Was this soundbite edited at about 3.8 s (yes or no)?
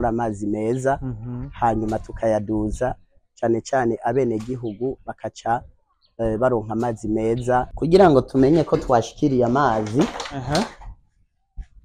no